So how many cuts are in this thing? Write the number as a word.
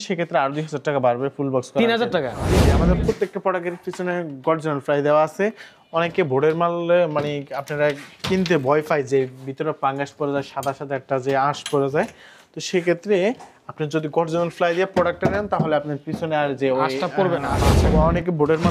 two